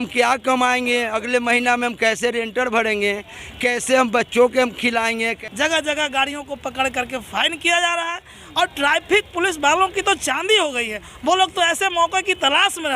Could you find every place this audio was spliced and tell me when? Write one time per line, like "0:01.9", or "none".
0:05.3